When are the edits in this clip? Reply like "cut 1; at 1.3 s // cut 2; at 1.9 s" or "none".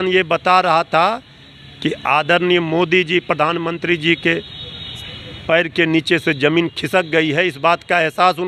none